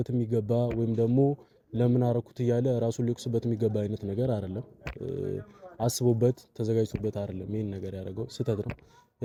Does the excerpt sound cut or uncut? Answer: uncut